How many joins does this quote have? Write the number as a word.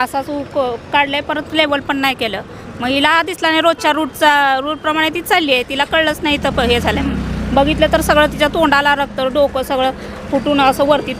zero